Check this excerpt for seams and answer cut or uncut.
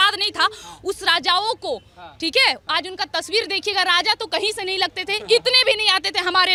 uncut